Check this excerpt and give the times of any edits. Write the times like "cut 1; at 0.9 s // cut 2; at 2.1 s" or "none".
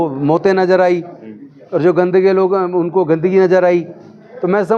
none